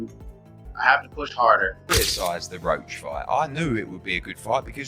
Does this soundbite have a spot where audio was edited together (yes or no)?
yes